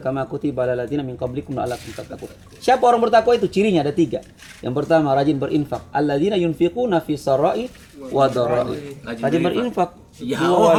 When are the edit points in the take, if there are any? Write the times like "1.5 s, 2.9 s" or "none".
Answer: none

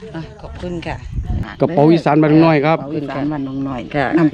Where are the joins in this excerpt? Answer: 1.4 s

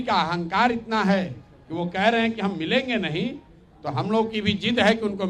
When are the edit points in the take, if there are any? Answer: none

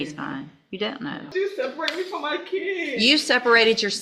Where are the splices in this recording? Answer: 1.3 s

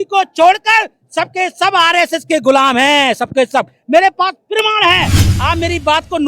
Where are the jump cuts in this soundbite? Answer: 5.2 s

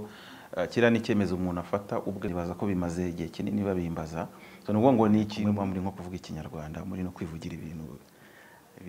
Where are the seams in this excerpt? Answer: 2.3 s, 5.4 s

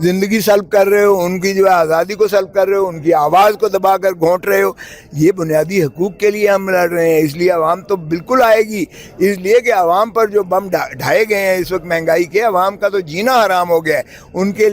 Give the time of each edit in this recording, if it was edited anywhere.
none

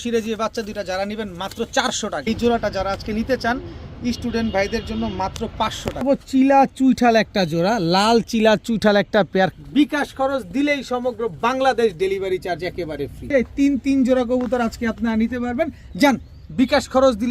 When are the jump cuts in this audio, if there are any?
2.2 s, 6.0 s, 9.6 s, 13.3 s

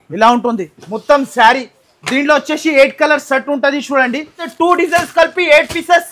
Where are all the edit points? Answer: 4.4 s

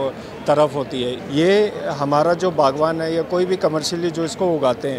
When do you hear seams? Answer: 1.2 s

